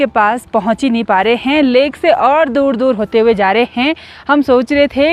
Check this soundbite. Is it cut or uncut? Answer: uncut